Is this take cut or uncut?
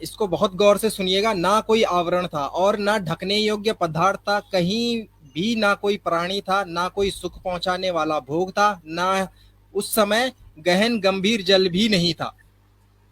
uncut